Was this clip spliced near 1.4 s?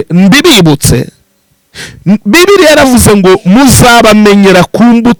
no; 0 cuts

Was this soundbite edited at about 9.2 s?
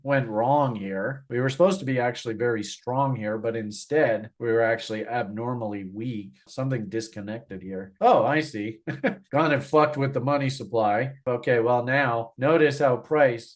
no; 2 cuts; at 6.5 s, 11.2 s

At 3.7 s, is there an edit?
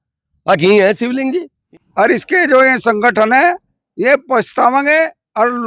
no; 1 cut; at 1.6 s

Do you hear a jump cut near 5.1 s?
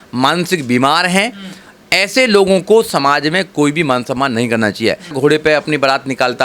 yes; 1 cut; at 5.1 s

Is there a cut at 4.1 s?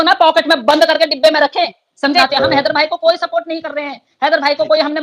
no; 1 cut; at 2.3 s

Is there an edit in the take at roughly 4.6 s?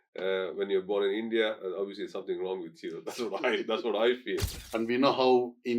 yes; 1 cut; at 4.6 s

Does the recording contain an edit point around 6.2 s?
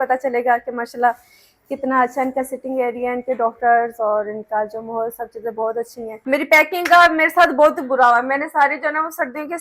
yes; 1 cut; at 6.2 s

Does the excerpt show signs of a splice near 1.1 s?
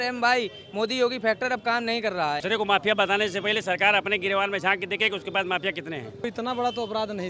no; 2 cuts; at 2.4 s, 6.3 s

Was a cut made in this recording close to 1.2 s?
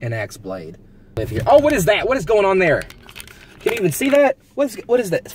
yes; 1 cut; at 1.2 s

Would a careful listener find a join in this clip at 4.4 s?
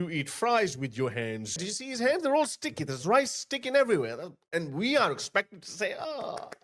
no; 1 cut; at 1.6 s

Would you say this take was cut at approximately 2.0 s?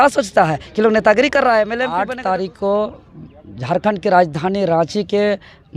yes; 1 cut; at 2.0 s

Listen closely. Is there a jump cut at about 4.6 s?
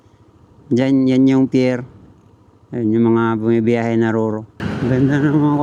yes; 1 cut; at 4.6 s

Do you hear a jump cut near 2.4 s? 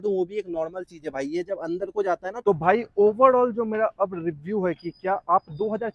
yes; 1 cut; at 2.4 s

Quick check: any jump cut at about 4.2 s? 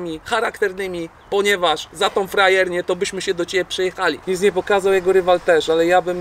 yes; 1 cut; at 4.2 s

